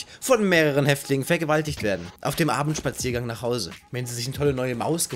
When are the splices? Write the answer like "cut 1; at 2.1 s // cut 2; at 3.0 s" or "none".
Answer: none